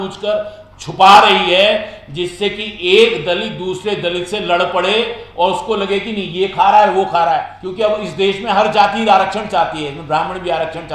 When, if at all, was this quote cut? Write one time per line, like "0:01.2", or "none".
0:07.6